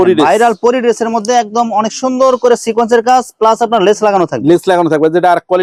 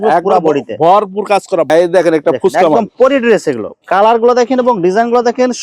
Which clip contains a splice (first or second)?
second